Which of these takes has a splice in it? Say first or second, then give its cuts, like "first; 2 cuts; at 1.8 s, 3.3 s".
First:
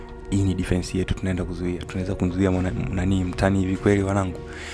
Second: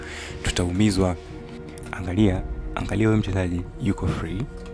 second; 1 cut; at 1.6 s